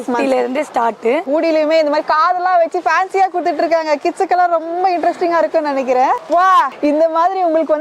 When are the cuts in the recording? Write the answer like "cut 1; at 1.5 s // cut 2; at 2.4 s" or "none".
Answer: cut 1; at 1.2 s // cut 2; at 6.2 s